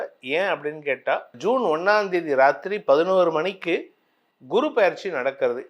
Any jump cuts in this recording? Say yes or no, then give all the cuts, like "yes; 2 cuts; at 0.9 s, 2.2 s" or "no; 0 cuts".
yes; 1 cut; at 1.3 s